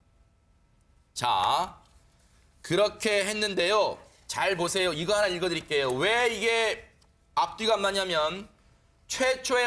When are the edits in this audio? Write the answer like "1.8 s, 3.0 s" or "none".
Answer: 8.6 s